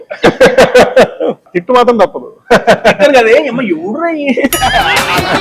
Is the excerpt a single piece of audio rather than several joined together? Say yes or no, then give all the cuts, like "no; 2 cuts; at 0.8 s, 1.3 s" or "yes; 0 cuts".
no; 1 cut; at 1.5 s